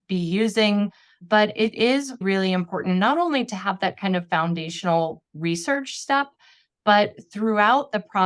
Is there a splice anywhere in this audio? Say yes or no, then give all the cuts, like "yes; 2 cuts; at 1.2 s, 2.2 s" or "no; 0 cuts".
yes; 2 cuts; at 1.2 s, 2.2 s